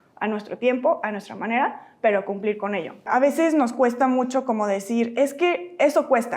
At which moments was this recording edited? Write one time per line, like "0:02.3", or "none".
0:03.1

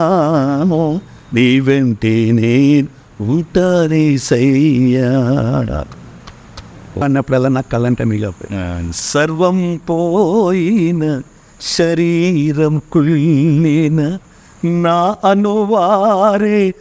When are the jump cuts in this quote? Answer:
0:07.0

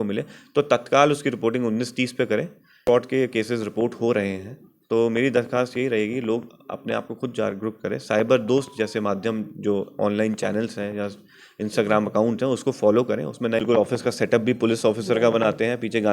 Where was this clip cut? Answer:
0:02.8
0:13.6

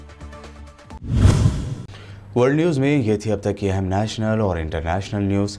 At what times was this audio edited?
none

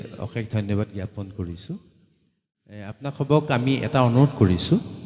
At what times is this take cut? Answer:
0:02.9

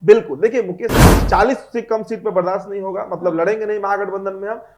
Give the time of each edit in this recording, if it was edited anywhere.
0:01.2

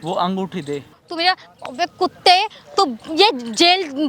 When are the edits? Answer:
0:01.0

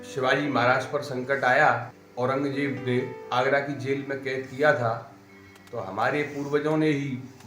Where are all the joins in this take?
0:02.0
0:02.9

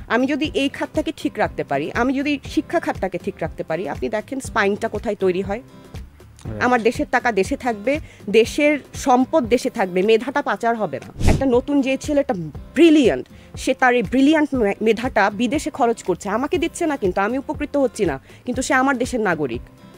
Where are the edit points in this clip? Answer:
0:11.2

